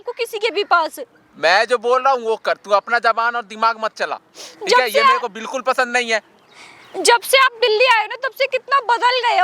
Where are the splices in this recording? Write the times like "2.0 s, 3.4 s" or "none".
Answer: none